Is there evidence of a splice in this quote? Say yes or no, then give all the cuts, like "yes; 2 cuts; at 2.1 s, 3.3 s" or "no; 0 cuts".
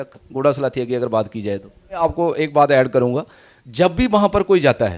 yes; 1 cut; at 2.0 s